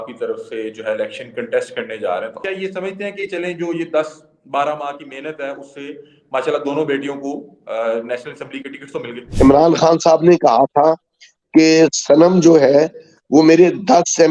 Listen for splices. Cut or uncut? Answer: cut